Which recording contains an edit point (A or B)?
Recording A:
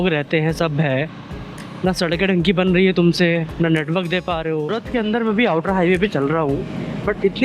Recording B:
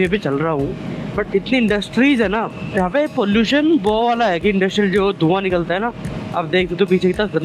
A